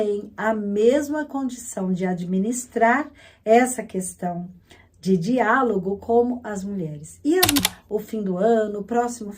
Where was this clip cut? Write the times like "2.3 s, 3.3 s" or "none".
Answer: 7.6 s